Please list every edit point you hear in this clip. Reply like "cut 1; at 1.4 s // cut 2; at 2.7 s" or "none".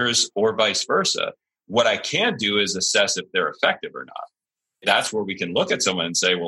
cut 1; at 4.8 s